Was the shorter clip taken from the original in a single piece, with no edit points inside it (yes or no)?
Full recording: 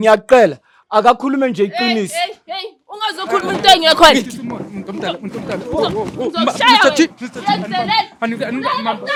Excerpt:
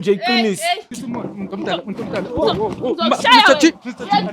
no